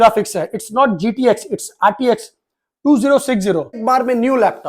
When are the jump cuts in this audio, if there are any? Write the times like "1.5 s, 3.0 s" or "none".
3.8 s

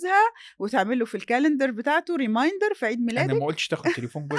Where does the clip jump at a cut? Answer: none

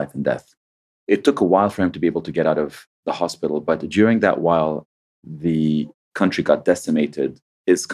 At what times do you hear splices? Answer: 0.9 s

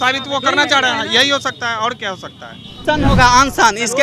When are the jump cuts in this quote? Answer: 2.8 s

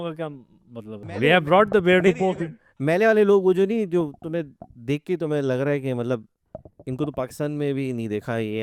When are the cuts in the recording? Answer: 1.0 s

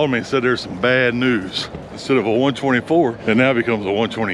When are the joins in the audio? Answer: 2.0 s, 3.2 s

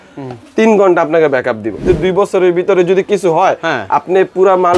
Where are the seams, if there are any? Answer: 1.8 s

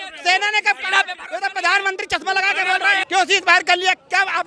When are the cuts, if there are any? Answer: 3.0 s

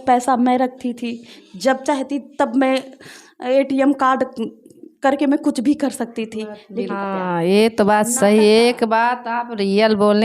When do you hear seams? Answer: 6.9 s

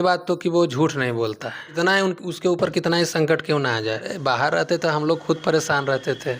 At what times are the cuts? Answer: 1.6 s, 4.1 s

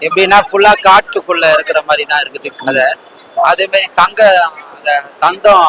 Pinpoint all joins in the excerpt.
none

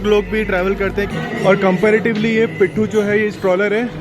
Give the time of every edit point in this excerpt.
1.1 s

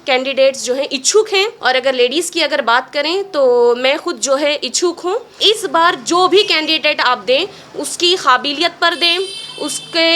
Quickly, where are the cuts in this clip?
1.6 s, 5.4 s

